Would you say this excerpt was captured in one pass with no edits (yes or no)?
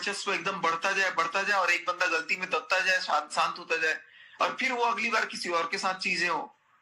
yes